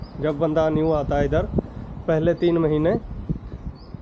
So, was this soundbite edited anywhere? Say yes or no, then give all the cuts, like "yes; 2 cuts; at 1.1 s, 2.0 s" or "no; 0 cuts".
no; 0 cuts